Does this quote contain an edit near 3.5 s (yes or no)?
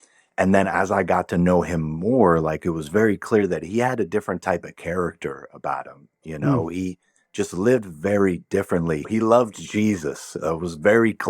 no